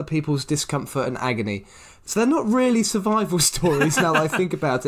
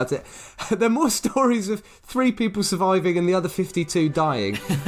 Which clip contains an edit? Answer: first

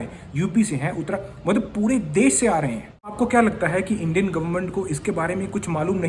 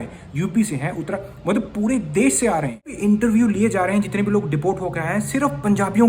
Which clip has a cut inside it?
second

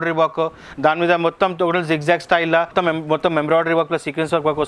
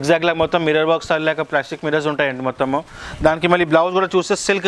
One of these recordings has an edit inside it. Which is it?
first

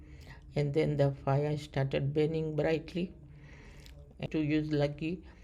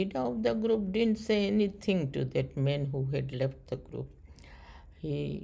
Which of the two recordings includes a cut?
first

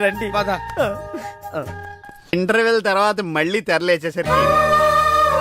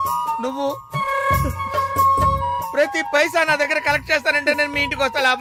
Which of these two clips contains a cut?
first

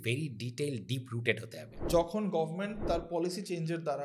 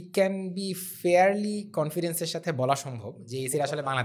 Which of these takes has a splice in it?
first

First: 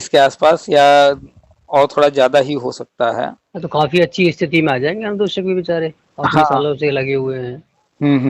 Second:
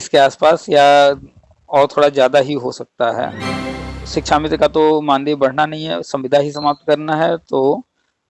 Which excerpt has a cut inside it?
second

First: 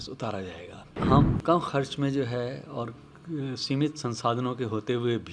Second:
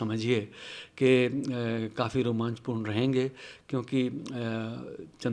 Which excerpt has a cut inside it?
first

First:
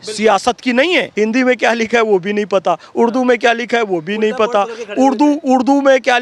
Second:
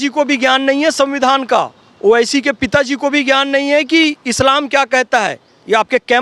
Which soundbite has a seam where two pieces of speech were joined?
first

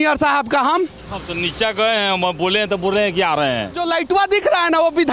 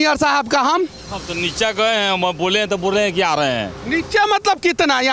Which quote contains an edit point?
first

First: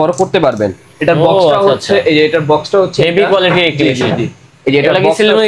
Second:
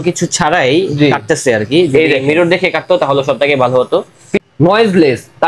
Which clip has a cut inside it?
second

